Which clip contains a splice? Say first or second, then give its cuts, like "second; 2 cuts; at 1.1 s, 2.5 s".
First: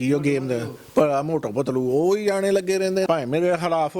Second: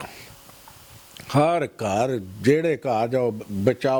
first; 1 cut; at 3.1 s